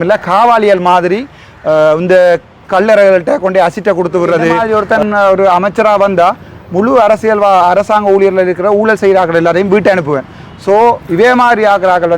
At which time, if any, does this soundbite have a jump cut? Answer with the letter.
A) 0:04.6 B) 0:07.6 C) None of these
A